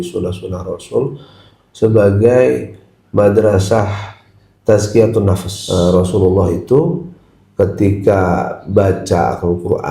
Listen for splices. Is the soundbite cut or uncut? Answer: cut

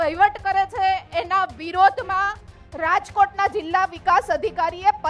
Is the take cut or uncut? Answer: uncut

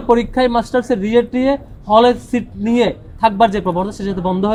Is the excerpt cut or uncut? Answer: uncut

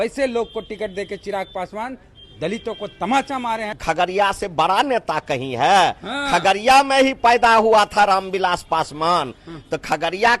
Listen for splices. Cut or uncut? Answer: cut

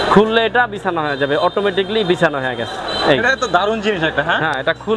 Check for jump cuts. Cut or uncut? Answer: uncut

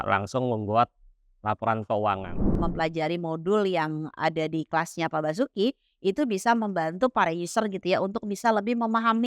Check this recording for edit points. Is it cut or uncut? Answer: cut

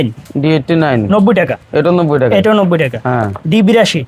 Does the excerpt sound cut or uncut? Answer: uncut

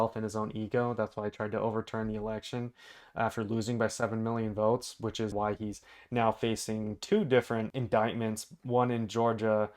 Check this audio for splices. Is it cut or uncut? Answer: cut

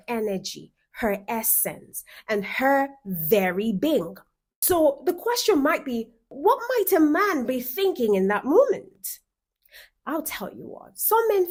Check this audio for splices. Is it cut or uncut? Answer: uncut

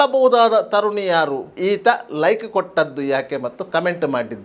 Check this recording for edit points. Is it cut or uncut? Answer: cut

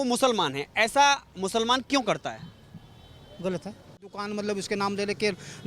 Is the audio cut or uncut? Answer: cut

